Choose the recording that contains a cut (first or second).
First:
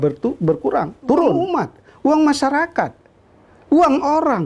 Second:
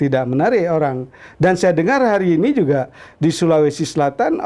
first